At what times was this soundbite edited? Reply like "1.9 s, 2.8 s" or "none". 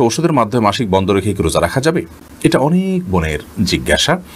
none